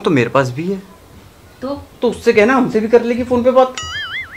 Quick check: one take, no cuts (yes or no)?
yes